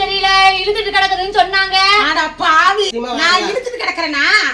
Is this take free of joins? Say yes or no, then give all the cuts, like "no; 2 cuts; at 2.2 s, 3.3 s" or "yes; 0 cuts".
no; 1 cut; at 2.9 s